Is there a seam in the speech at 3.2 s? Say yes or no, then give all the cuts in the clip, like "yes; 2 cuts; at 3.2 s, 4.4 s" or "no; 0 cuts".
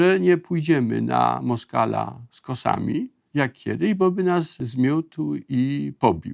yes; 2 cuts; at 3.2 s, 4.5 s